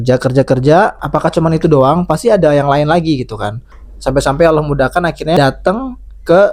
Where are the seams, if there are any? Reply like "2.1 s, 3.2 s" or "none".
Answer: 1.1 s, 3.9 s, 5.4 s